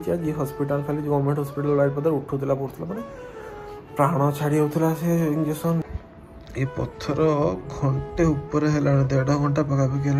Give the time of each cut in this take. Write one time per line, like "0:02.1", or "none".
0:05.8